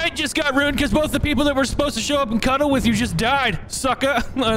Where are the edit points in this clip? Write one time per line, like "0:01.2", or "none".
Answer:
none